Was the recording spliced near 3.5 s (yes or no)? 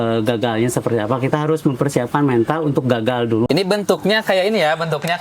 yes